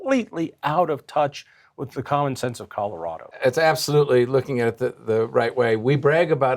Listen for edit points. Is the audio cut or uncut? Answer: cut